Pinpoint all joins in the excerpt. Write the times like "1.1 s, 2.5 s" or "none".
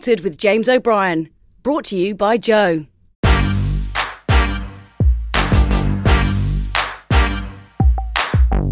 3.0 s